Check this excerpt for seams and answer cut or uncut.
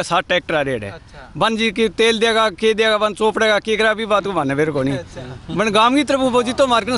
uncut